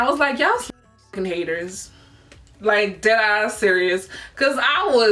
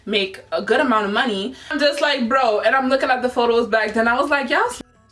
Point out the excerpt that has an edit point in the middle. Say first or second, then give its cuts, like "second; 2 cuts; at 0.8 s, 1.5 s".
second; 1 cut; at 1.6 s